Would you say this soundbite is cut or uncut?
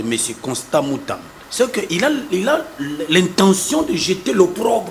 cut